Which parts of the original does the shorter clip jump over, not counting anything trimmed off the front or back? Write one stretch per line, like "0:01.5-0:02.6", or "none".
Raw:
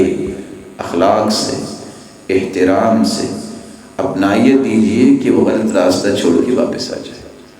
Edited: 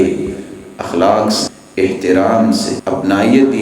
0:01.6-0:02.1
0:03.3-0:03.9